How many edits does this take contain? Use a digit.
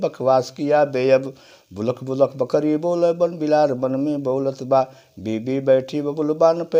0